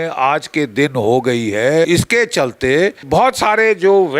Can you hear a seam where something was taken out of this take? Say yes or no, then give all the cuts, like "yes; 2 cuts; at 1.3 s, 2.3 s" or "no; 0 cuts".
yes; 2 cuts; at 1.9 s, 3.1 s